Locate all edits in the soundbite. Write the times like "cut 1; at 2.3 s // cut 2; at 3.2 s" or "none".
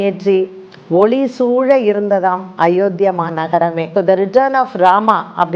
cut 1; at 3.8 s